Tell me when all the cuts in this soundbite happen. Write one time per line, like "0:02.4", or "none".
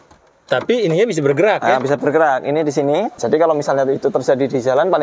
0:03.2